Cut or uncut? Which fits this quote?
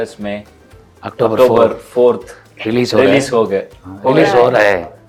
uncut